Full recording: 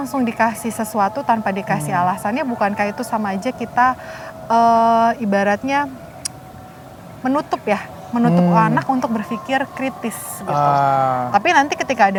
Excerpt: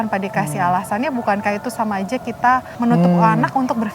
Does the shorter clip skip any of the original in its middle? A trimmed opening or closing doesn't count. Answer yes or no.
yes